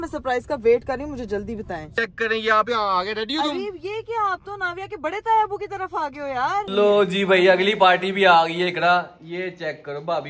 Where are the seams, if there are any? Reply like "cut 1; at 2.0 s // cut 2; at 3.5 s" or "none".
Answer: cut 1; at 1.9 s // cut 2; at 6.7 s